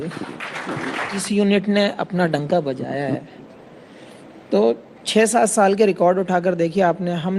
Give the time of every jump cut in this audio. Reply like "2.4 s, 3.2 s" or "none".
1.2 s